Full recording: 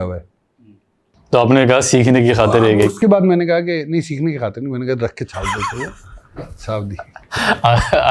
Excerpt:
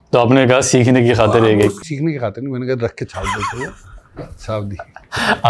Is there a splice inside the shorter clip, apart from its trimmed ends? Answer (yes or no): yes